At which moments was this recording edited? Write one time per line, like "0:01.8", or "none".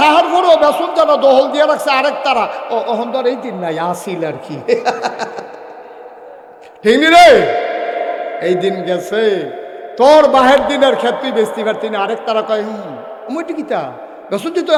none